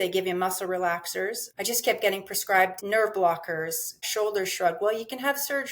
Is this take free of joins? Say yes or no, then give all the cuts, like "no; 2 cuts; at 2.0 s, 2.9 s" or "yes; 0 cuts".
no; 3 cuts; at 1.4 s, 2.8 s, 4.0 s